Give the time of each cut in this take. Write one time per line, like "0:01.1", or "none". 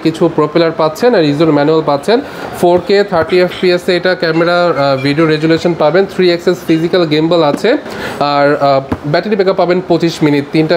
none